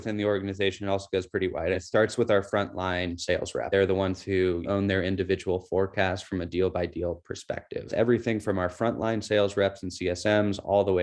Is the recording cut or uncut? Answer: cut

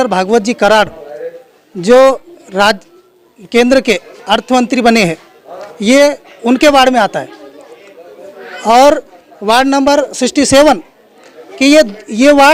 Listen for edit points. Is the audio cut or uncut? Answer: uncut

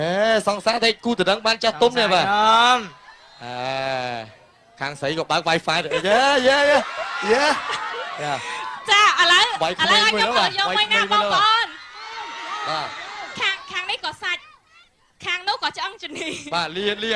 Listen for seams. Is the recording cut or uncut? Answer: cut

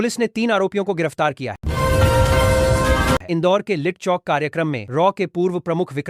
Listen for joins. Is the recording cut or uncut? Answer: cut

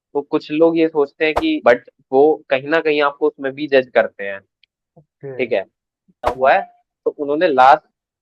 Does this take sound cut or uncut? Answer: cut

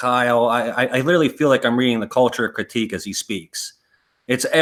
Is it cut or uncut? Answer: uncut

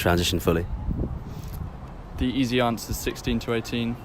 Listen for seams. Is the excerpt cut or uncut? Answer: cut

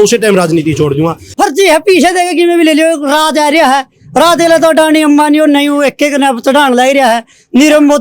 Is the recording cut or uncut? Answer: cut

